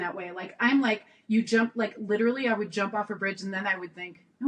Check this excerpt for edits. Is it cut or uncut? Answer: uncut